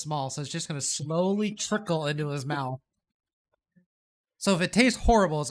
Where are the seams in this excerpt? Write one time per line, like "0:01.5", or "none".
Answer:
none

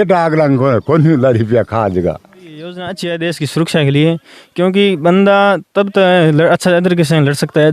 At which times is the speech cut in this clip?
0:02.8

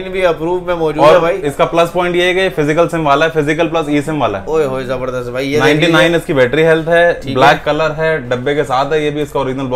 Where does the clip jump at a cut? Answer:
none

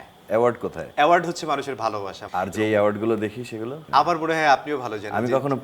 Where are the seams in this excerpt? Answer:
0:00.8
0:02.1
0:03.8

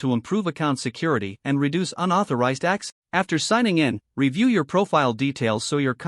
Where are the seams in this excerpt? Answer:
0:02.8

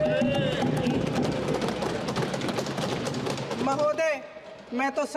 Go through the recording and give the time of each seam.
none

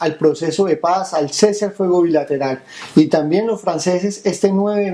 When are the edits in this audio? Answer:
0:01.0

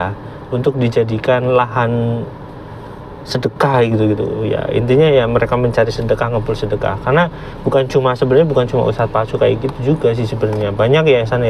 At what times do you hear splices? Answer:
none

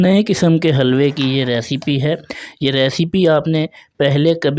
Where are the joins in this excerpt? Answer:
none

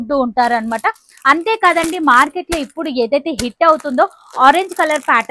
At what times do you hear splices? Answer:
none

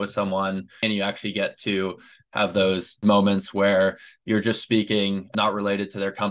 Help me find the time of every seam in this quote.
0:00.8
0:03.0
0:05.3

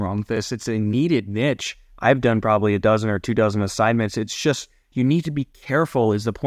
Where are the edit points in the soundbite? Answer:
none

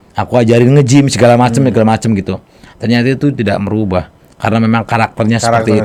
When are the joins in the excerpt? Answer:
none

